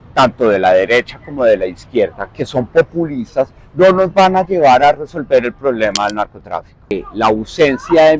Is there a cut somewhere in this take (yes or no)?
yes